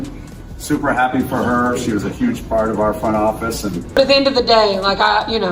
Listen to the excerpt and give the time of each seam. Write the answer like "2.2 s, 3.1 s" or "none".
3.8 s